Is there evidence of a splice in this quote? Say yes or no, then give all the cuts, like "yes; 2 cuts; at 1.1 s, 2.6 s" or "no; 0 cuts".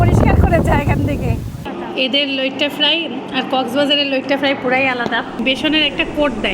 yes; 2 cuts; at 1.6 s, 5.4 s